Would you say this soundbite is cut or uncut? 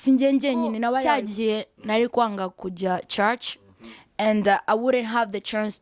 cut